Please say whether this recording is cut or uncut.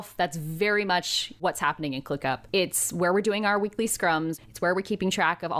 cut